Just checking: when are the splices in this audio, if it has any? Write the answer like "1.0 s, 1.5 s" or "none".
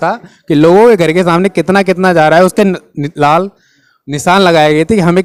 none